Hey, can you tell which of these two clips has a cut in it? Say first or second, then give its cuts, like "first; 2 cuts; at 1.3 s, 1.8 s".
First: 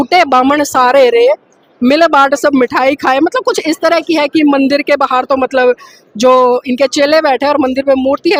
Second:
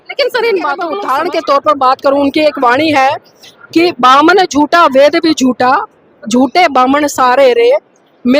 second; 1 cut; at 0.9 s